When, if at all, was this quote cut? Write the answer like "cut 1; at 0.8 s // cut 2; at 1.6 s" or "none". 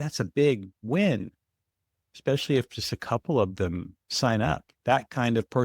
cut 1; at 4.7 s

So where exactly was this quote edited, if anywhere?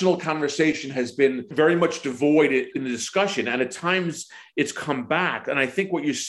cut 1; at 1.5 s // cut 2; at 2.7 s

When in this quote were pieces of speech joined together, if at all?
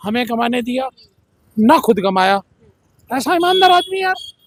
none

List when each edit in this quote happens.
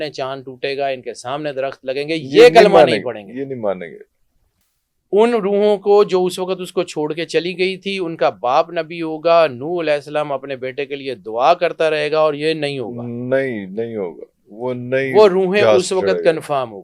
none

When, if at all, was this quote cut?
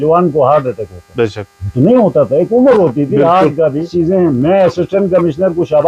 cut 1; at 3.9 s

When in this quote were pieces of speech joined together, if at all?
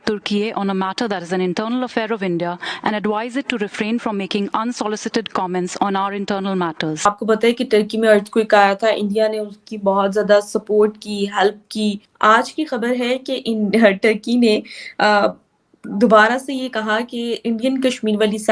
cut 1; at 7.0 s // cut 2; at 12.1 s

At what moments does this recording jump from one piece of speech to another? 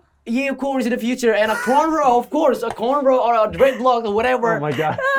none

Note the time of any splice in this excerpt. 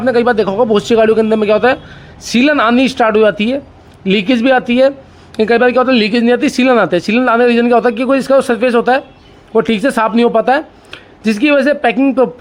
none

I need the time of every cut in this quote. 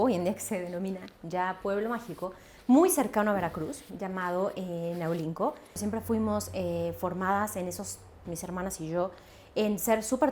cut 1; at 5.8 s

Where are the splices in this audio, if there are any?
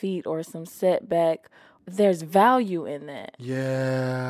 none

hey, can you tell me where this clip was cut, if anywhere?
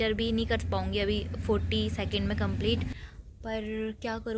cut 1; at 3.0 s

